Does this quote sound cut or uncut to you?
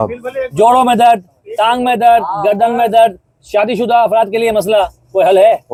uncut